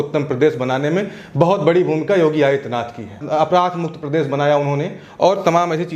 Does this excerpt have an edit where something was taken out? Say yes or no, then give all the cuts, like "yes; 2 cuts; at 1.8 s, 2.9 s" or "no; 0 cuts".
no; 0 cuts